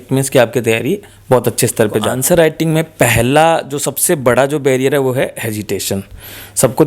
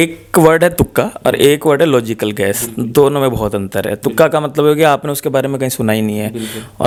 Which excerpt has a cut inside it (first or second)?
first